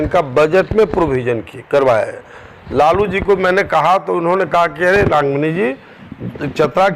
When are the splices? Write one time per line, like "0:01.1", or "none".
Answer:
none